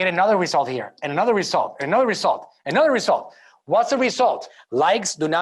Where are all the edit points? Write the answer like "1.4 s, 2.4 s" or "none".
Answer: 4.5 s